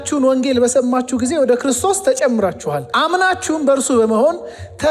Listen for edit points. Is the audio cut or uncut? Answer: cut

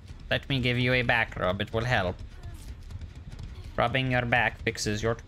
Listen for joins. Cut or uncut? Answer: uncut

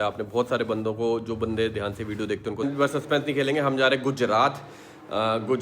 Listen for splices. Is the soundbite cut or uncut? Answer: cut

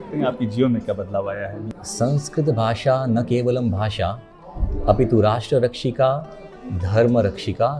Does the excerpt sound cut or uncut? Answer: cut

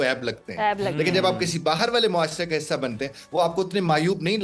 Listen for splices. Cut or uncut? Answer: uncut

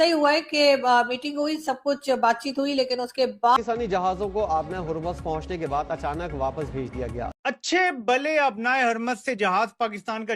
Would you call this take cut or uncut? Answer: cut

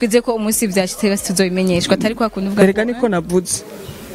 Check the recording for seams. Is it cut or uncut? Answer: uncut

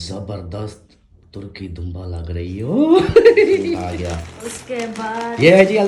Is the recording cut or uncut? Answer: cut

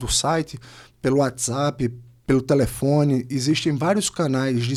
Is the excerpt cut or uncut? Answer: uncut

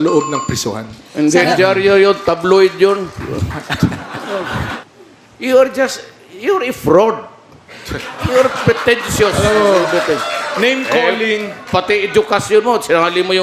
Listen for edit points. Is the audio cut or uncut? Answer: cut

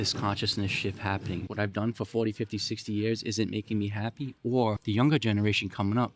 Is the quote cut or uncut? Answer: cut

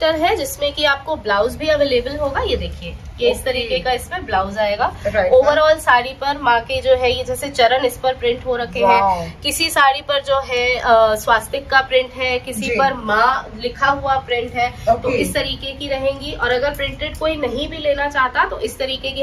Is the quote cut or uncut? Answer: uncut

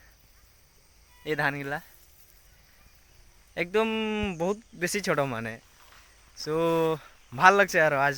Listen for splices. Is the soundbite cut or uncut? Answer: uncut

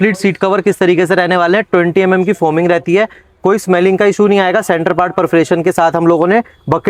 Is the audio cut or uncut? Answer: uncut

